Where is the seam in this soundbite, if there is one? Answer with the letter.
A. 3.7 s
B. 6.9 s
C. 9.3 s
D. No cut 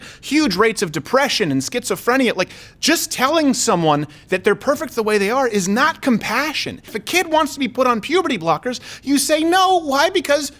B